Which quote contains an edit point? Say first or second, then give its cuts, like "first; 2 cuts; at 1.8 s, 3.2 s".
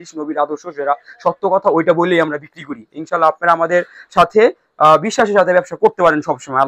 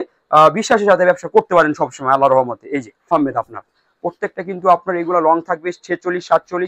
second; 1 cut; at 3.1 s